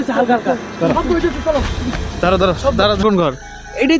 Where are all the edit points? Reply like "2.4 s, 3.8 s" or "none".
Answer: 3.0 s